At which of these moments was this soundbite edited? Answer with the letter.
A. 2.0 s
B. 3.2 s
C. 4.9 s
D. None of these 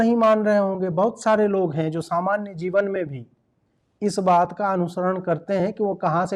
D